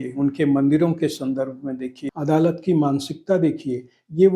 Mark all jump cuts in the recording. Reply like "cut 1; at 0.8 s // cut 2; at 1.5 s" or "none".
cut 1; at 2.0 s